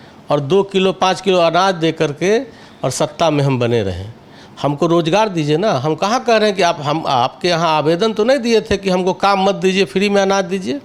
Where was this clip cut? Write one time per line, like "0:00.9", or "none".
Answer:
none